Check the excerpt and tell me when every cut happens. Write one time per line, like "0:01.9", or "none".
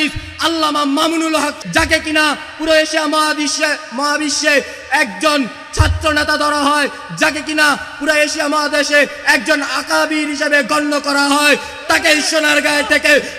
0:01.5